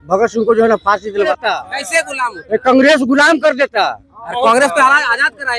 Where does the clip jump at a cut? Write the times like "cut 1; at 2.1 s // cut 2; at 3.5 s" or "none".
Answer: cut 1; at 1.3 s